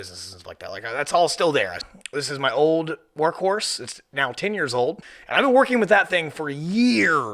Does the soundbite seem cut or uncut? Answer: cut